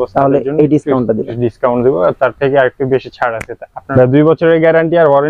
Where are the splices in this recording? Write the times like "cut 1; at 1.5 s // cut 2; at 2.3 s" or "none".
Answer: cut 1; at 3.7 s